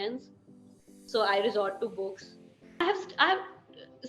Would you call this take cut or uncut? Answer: cut